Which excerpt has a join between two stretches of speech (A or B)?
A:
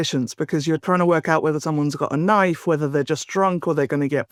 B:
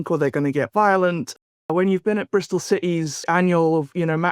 B